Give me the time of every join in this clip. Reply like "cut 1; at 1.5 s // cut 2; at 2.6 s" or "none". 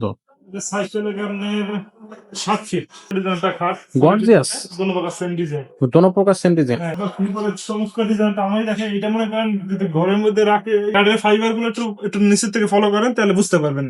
cut 1; at 3.1 s // cut 2; at 6.9 s // cut 3; at 10.9 s